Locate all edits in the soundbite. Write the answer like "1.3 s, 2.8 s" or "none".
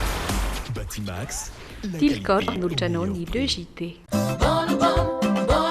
4.0 s